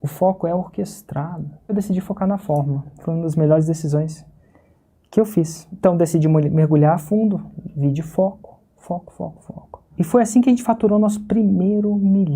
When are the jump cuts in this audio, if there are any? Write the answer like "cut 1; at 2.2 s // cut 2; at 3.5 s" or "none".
cut 1; at 1.7 s // cut 2; at 5.6 s // cut 3; at 9.9 s